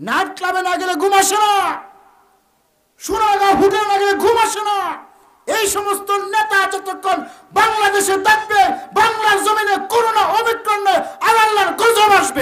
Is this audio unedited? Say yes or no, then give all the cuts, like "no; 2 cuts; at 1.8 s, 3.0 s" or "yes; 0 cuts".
yes; 0 cuts